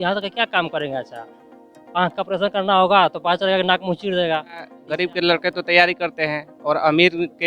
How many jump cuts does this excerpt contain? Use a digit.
1